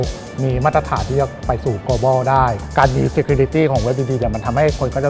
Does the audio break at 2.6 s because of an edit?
yes; 1 cut; at 2.6 s

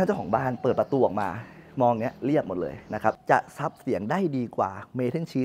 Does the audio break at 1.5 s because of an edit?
no; 1 cut; at 3.2 s

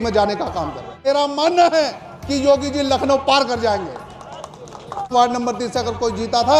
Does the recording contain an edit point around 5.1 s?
yes; 2 cuts; at 1.0 s, 5.1 s

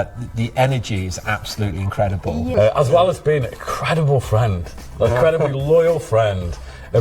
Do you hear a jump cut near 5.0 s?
no; 1 cut; at 2.5 s

